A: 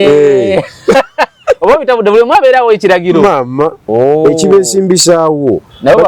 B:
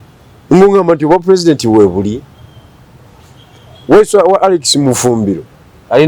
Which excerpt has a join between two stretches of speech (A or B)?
A